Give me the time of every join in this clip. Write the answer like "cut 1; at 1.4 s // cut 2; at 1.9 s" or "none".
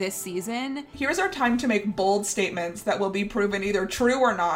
cut 1; at 0.9 s